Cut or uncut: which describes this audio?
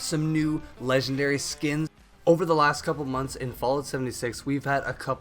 cut